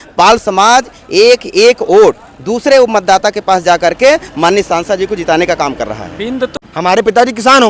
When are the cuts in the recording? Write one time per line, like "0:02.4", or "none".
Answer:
0:06.5